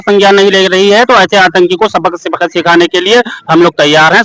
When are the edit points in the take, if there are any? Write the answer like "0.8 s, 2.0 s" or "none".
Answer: none